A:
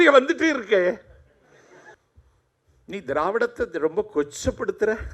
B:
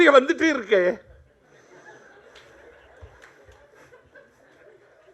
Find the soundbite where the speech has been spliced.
A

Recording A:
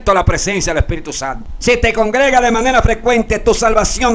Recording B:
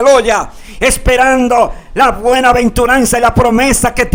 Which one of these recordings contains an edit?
A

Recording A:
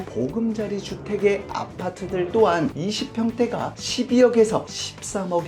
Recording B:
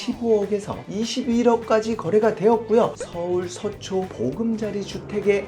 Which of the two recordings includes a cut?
B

